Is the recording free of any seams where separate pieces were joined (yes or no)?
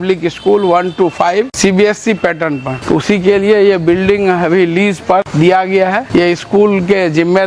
no